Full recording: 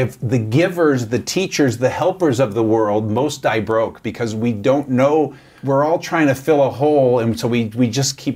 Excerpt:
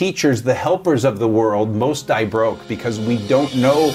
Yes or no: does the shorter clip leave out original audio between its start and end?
no